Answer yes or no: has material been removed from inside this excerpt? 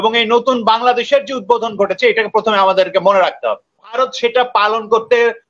yes